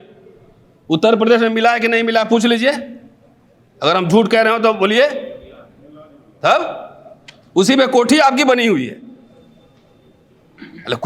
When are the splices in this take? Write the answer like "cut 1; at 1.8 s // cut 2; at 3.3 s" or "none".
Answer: none